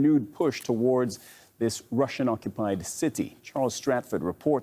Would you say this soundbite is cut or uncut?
uncut